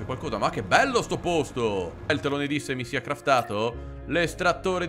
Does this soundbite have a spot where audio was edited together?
yes; 1 cut; at 2.1 s

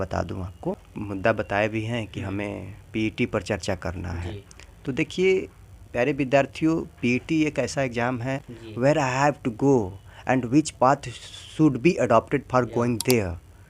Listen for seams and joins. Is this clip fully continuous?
no; 2 cuts; at 0.9 s, 8.4 s

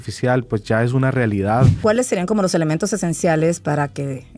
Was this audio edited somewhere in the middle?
yes; 1 cut; at 1.7 s

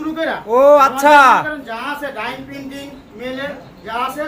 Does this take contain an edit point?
no; 0 cuts

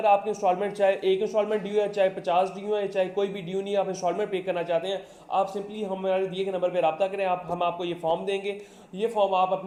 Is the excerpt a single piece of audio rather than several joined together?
yes; 0 cuts

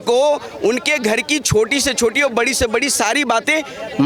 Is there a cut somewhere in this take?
no; 0 cuts

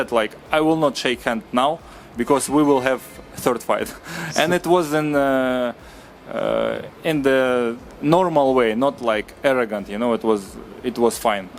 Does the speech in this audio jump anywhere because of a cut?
no; 0 cuts

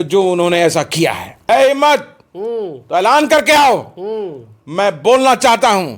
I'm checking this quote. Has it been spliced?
yes; 1 cut; at 1.4 s

